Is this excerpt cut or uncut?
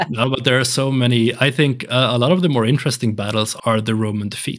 cut